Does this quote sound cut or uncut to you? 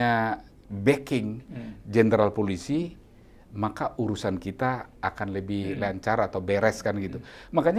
uncut